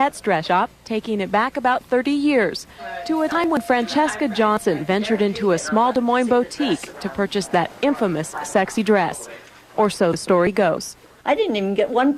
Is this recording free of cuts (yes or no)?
no